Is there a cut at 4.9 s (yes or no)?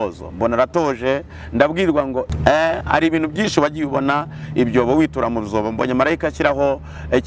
no